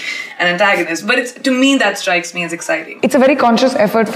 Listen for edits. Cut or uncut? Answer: cut